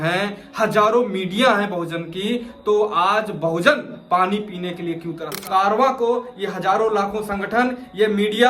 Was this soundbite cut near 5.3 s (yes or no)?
yes